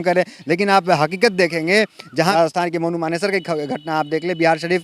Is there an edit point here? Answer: yes; 1 cut; at 2.3 s

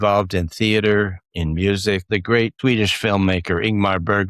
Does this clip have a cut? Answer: yes; 1 cut; at 2.5 s

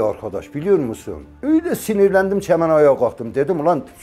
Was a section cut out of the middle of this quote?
no; 0 cuts

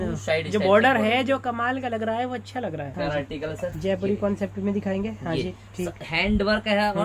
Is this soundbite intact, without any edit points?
no; 1 cut; at 2.9 s

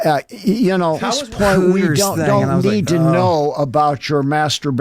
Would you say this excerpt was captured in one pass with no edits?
no; 1 cut; at 1.1 s

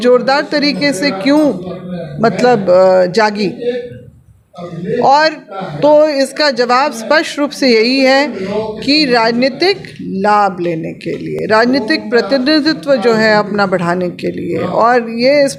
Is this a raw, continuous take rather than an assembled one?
yes; 0 cuts

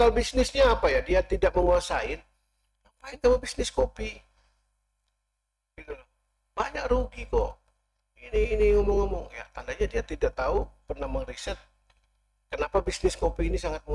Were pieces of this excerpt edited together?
no; 0 cuts

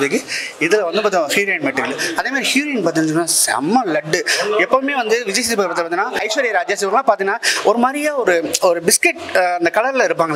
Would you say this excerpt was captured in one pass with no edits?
no; 1 cut; at 6.2 s

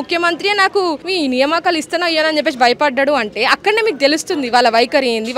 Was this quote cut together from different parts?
no; 0 cuts

